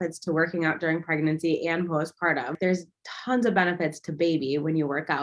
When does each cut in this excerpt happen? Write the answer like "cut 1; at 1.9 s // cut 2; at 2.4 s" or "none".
cut 1; at 2.6 s